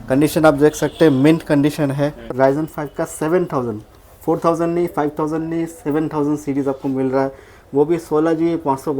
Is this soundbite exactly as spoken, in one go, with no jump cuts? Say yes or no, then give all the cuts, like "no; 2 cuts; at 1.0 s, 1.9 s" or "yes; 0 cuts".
no; 1 cut; at 2.3 s